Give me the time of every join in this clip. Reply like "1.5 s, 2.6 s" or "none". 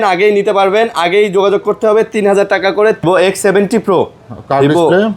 3.0 s